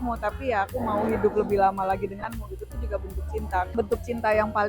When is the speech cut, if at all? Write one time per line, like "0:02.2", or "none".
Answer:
0:03.7